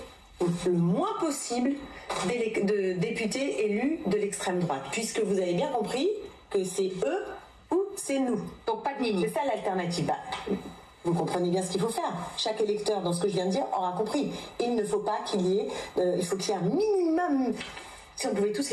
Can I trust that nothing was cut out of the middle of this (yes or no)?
no